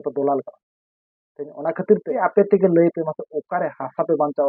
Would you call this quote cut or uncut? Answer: cut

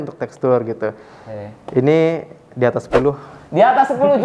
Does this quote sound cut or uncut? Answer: uncut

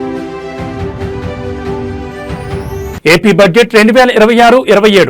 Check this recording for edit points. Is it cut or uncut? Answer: cut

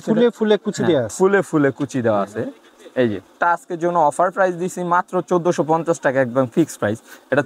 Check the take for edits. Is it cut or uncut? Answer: cut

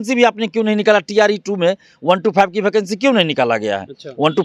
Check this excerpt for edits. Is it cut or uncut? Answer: uncut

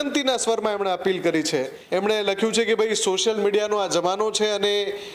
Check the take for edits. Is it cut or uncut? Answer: cut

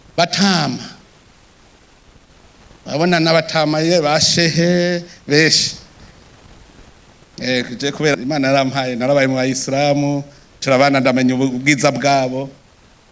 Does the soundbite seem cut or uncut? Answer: cut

